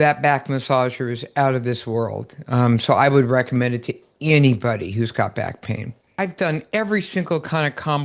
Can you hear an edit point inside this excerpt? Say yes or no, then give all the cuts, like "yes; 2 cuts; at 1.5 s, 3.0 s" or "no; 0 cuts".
yes; 1 cut; at 6.1 s